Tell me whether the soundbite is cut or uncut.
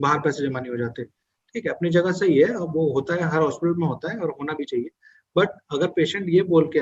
uncut